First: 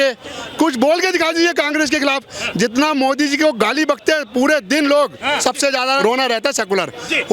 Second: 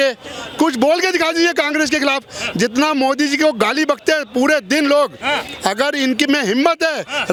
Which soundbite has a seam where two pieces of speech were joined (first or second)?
first